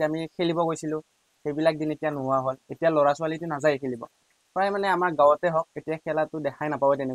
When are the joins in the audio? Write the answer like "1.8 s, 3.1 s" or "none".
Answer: none